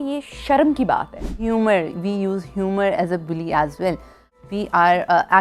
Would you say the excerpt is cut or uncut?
cut